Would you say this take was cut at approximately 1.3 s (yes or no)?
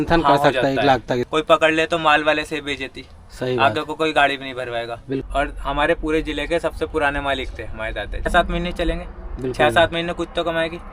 yes